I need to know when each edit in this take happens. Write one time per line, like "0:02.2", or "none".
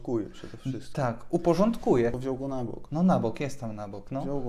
0:02.2

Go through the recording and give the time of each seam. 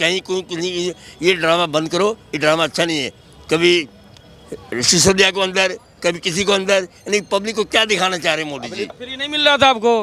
0:08.9

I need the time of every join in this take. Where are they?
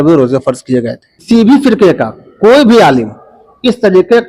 0:01.2

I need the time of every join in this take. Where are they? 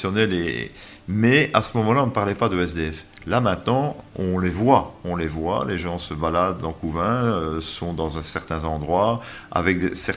none

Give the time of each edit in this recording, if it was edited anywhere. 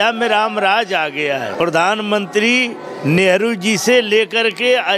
0:01.5

